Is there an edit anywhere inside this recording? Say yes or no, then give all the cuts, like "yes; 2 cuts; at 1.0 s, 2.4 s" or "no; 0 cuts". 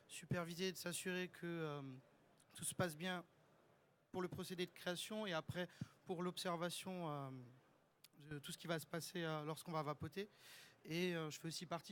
yes; 1 cut; at 9.3 s